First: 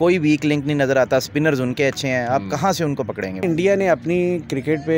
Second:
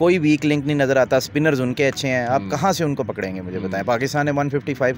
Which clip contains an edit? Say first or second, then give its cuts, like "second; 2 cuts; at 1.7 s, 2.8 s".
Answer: first; 1 cut; at 3.4 s